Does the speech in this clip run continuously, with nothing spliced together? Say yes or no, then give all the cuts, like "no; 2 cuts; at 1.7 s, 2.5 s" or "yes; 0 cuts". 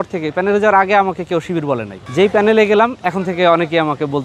yes; 0 cuts